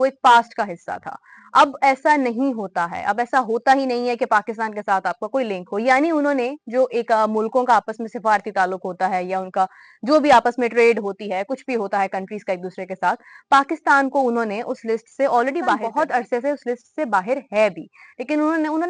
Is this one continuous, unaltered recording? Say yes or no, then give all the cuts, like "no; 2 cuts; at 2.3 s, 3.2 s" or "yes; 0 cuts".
no; 1 cut; at 15.8 s